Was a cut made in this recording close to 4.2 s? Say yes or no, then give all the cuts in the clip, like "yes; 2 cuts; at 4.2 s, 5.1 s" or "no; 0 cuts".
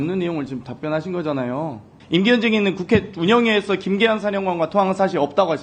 no; 1 cut; at 1.9 s